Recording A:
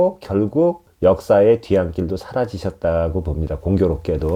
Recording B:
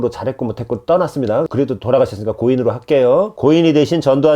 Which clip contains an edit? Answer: B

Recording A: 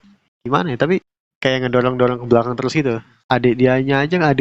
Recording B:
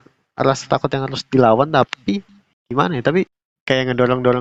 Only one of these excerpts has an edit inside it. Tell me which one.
A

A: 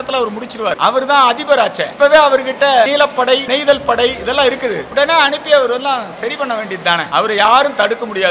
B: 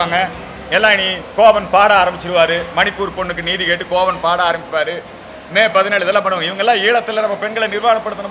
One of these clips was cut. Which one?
A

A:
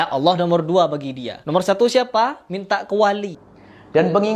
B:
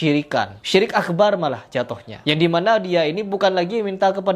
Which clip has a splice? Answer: A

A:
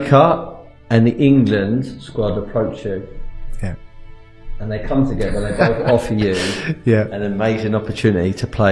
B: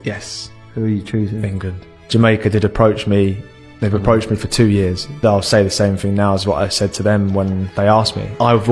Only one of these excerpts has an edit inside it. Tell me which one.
B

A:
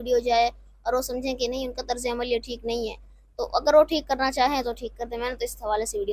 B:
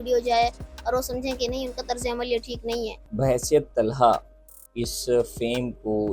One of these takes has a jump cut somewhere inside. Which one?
B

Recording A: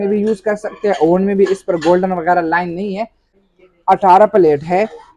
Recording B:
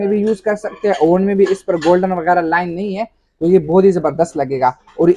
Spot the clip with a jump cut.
A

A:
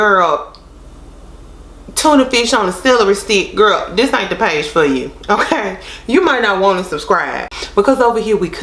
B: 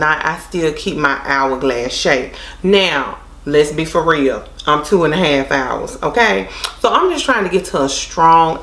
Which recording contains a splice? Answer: A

